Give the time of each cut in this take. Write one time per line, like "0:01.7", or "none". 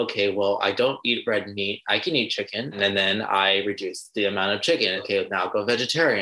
0:02.8
0:05.0